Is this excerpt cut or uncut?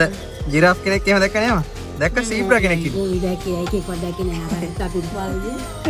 uncut